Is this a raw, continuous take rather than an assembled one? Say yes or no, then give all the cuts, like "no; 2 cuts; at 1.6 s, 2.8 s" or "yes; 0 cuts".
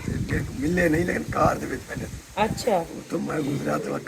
yes; 0 cuts